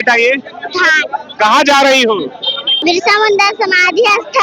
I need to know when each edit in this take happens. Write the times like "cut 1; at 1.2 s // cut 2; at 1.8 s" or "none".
cut 1; at 2.7 s